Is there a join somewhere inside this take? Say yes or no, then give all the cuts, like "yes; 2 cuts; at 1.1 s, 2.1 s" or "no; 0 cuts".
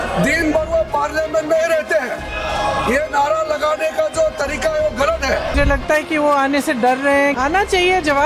yes; 2 cuts; at 5.5 s, 7.4 s